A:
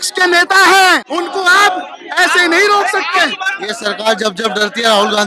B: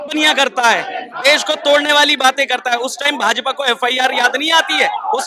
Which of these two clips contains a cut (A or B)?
A